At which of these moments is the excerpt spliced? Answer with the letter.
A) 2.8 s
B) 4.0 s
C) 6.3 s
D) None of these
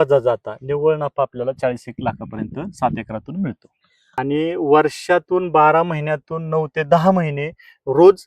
B